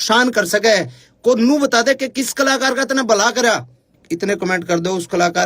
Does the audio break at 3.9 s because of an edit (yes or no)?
yes